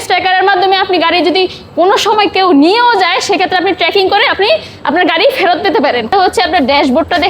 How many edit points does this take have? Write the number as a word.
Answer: one